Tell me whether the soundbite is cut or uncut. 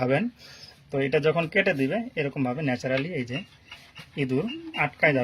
uncut